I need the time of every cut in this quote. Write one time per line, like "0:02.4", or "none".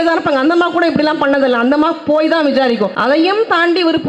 0:03.0